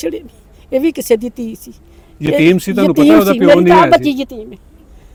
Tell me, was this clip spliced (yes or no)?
no